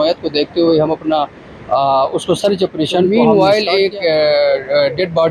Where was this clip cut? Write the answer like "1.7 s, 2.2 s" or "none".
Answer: 3.1 s